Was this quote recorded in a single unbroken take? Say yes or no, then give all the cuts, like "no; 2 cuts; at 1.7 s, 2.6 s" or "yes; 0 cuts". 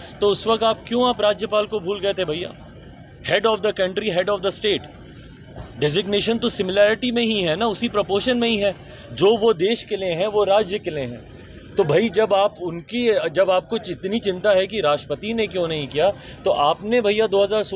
yes; 0 cuts